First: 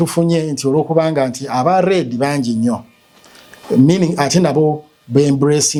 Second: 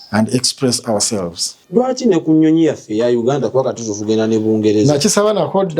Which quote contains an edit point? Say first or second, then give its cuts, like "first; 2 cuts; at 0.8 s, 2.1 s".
second; 1 cut; at 1.6 s